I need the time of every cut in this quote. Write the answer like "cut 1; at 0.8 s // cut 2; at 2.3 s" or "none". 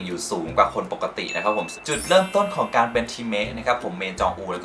cut 1; at 1.7 s